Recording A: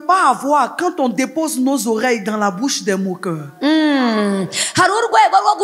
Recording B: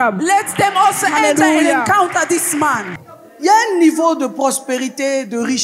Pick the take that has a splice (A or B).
B